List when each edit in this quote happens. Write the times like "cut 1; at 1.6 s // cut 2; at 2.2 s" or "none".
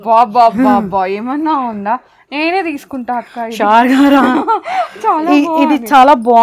none